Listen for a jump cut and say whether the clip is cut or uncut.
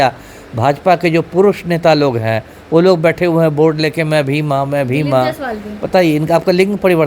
uncut